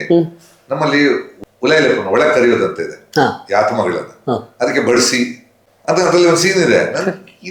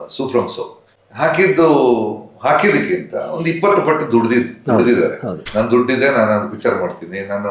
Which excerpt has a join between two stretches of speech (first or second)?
second